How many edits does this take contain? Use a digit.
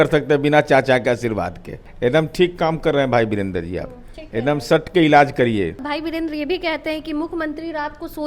2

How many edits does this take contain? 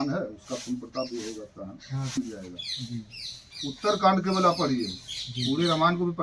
1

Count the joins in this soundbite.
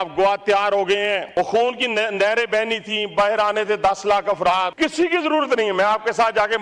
2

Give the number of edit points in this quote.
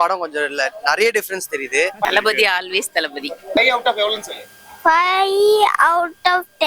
2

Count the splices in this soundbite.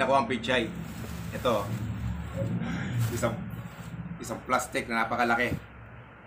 0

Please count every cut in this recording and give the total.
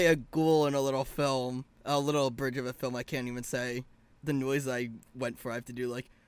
1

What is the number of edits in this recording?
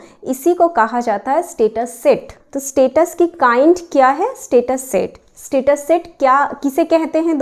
0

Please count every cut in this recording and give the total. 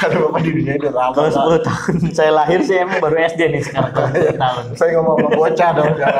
1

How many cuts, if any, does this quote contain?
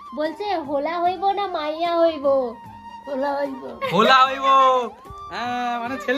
0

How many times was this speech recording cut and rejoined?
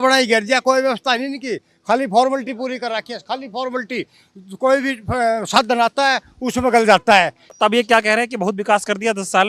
1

